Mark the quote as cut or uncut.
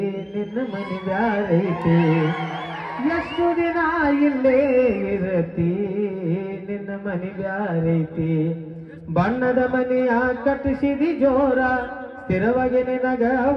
uncut